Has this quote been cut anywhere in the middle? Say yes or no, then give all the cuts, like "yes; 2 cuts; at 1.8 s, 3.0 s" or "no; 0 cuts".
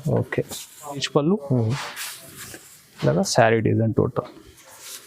yes; 1 cut; at 1.0 s